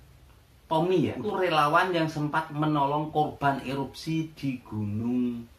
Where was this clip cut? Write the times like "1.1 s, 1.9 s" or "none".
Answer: 1.2 s